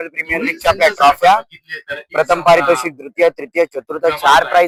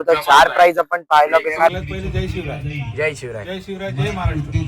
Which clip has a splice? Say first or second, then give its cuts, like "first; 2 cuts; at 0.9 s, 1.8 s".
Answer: second; 1 cut; at 1.7 s